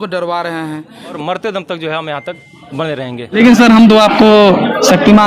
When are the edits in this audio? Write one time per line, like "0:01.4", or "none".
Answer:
0:01.1
0:03.4